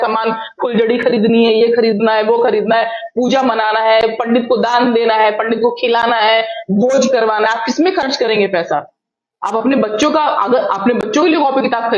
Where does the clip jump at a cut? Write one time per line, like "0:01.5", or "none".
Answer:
none